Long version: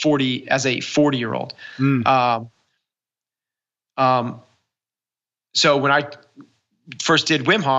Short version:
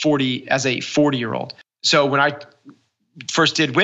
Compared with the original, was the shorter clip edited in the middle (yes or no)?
yes